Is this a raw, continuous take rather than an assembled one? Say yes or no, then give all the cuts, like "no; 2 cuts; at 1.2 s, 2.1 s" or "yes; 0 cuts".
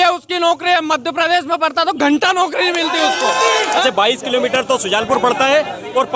no; 1 cut; at 3.8 s